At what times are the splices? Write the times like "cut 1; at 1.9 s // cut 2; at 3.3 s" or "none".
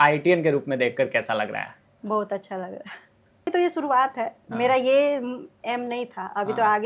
cut 1; at 3.5 s